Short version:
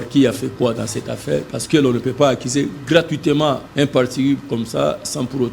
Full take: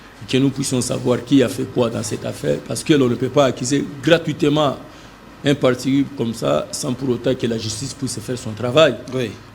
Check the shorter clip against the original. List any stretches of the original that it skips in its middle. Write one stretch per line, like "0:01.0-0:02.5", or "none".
0:04.8-0:05.3